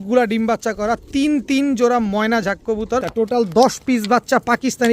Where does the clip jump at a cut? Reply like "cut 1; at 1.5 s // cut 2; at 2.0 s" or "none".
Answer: cut 1; at 3.1 s

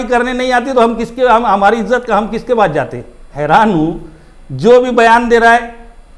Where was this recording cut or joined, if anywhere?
cut 1; at 3.3 s

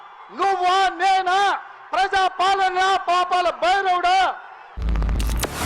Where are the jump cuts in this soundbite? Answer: cut 1; at 4.5 s

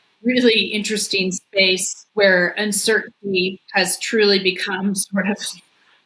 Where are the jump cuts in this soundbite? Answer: cut 1; at 2.0 s // cut 2; at 3.6 s

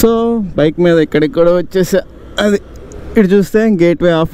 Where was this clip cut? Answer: none

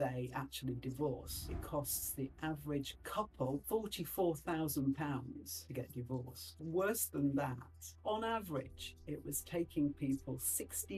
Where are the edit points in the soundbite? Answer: cut 1; at 1.4 s // cut 2; at 6.5 s // cut 3; at 8.0 s

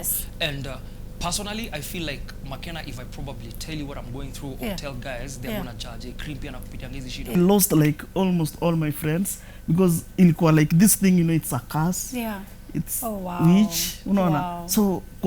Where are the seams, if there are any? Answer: cut 1; at 7.4 s

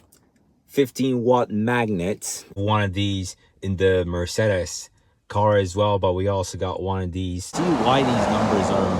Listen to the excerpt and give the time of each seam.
cut 1; at 2.6 s // cut 2; at 7.5 s

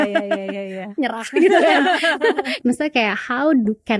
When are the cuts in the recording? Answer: cut 1; at 2.5 s

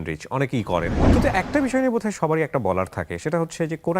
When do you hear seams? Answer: cut 1; at 1.0 s

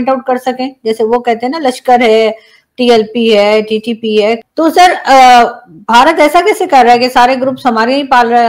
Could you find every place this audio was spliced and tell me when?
cut 1; at 4.4 s

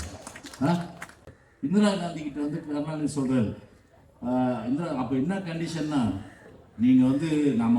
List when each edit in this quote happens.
cut 1; at 1.3 s

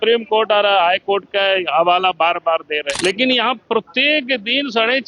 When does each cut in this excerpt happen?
cut 1; at 2.9 s

